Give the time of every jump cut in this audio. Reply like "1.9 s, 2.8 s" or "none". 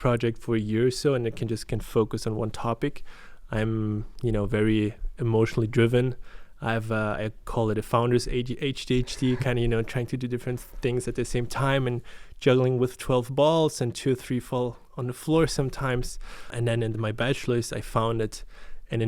16.5 s

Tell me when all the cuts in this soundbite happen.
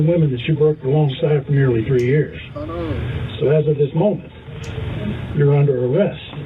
none

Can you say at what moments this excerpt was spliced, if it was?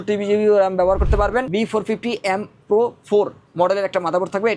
1.5 s

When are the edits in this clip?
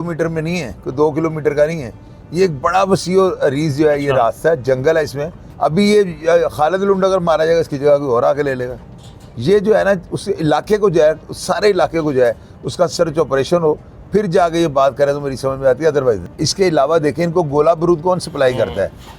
5.4 s, 16.4 s

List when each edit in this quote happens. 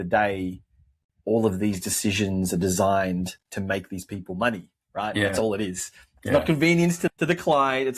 7.1 s

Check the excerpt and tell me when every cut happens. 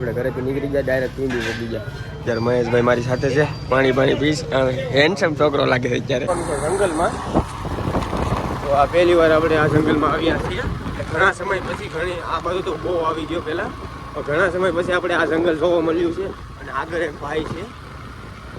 6.3 s

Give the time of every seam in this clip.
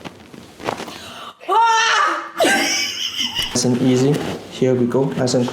3.6 s

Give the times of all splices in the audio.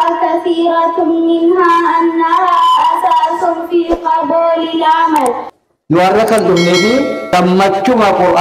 5.5 s, 7.2 s

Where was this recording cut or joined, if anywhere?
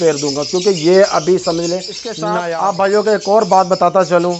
2.2 s

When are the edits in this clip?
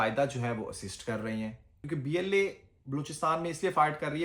1.8 s

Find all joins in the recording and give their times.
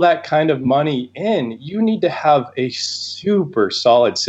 none

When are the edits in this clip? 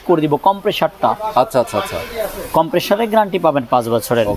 none

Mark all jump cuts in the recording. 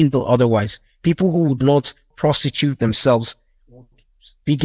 2.2 s, 3.7 s

